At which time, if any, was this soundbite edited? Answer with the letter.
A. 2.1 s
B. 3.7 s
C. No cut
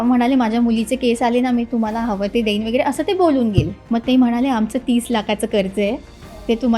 B